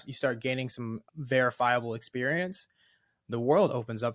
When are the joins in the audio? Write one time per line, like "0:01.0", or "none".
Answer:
0:01.1